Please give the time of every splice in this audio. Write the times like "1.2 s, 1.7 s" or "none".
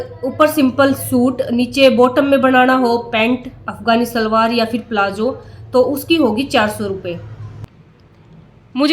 7.7 s